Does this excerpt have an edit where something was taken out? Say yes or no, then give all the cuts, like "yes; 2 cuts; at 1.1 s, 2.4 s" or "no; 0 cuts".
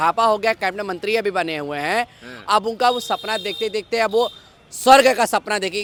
no; 0 cuts